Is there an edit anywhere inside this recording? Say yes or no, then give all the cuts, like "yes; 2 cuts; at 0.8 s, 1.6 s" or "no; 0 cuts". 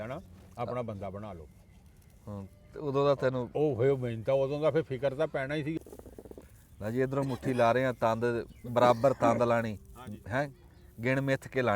yes; 1 cut; at 5.8 s